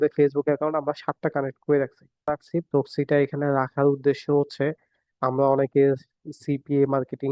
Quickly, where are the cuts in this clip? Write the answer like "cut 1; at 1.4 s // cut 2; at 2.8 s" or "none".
cut 1; at 2.4 s